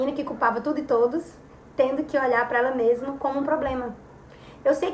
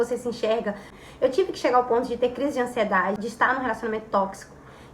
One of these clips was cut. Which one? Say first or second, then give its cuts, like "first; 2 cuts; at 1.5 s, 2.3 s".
second; 1 cut; at 3.2 s